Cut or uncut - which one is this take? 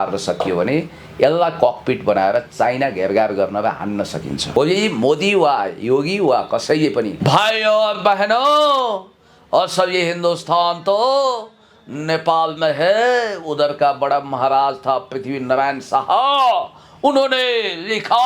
cut